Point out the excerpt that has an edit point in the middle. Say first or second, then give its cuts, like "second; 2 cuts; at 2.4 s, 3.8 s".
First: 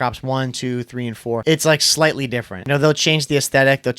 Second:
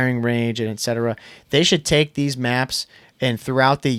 first; 2 cuts; at 1.4 s, 2.6 s